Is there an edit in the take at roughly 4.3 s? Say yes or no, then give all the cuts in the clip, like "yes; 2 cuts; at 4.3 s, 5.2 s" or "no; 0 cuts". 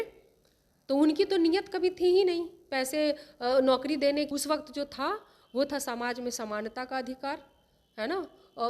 yes; 1 cut; at 4.3 s